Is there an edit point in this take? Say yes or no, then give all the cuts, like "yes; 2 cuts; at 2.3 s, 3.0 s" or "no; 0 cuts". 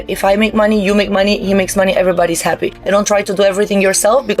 yes; 1 cut; at 2.7 s